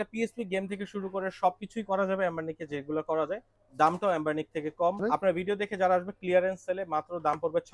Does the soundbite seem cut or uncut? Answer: cut